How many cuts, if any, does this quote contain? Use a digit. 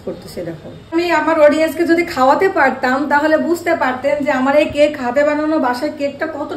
1